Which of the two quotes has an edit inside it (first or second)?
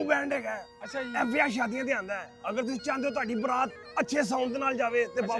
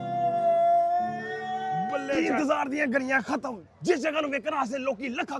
second